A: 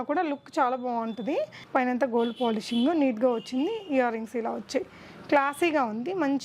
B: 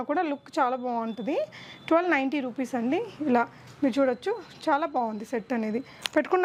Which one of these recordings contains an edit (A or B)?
A